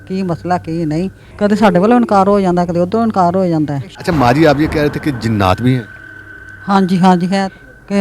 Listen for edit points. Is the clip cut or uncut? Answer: cut